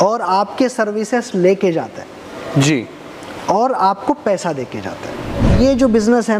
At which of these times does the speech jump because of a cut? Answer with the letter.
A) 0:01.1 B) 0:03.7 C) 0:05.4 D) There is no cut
C